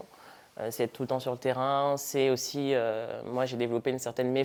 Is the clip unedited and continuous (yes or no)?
yes